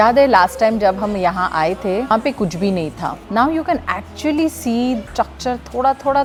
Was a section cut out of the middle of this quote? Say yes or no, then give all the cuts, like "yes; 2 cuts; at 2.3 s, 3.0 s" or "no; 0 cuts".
no; 0 cuts